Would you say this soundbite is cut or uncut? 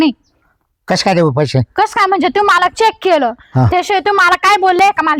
uncut